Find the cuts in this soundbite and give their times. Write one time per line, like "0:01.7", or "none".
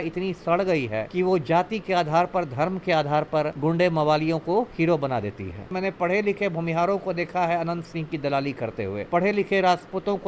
0:01.1
0:03.5
0:05.7
0:09.0